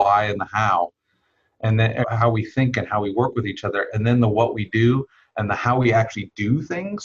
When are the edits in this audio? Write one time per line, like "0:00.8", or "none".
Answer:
0:02.0